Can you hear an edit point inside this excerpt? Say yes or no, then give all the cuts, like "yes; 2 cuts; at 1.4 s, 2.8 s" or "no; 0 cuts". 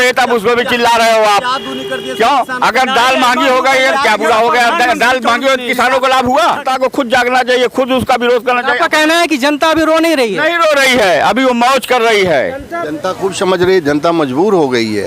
yes; 2 cuts; at 6.6 s, 12.9 s